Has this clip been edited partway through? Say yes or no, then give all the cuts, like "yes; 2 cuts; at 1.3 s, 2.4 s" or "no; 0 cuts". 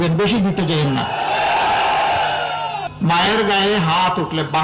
yes; 1 cut; at 2.9 s